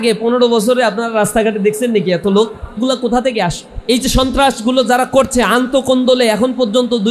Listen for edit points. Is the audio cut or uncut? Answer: cut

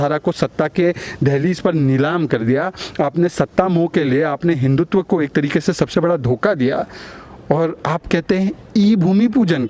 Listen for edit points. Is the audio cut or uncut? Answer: uncut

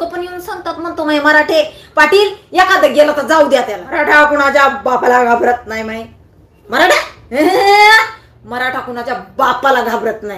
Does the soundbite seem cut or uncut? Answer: cut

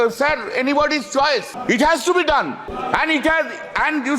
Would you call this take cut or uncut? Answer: cut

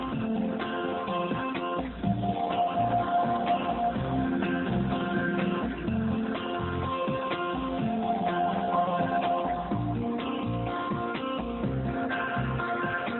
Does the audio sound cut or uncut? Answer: cut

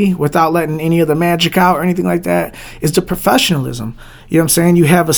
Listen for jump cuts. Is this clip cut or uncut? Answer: uncut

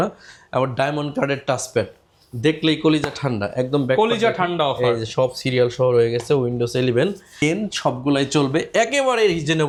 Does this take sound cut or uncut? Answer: uncut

